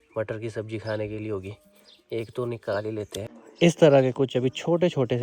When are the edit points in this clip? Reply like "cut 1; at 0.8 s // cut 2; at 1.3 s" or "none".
none